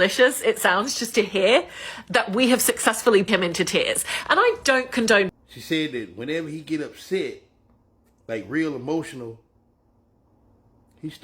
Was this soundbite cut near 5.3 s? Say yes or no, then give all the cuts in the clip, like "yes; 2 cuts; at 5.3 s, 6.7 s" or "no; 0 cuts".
yes; 2 cuts; at 3.3 s, 5.3 s